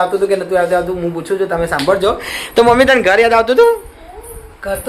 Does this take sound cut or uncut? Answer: uncut